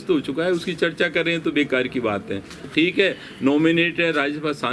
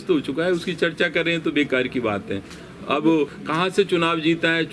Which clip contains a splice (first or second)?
first